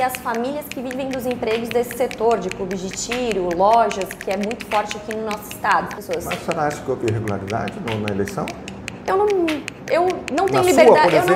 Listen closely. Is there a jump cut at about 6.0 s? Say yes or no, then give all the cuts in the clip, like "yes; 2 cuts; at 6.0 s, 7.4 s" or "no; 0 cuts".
yes; 1 cut; at 6.0 s